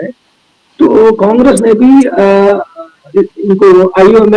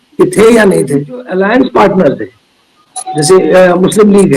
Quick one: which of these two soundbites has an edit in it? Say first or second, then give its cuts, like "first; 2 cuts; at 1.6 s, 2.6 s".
second; 1 cut; at 1.3 s